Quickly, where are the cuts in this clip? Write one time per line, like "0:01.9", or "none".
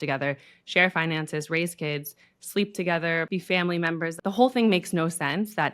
0:03.3
0:04.1